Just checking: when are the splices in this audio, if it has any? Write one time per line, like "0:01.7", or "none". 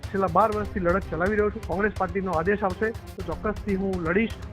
0:01.6